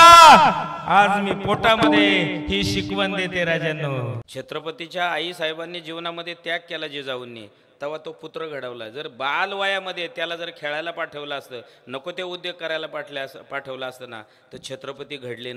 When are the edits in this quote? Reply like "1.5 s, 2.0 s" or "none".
4.3 s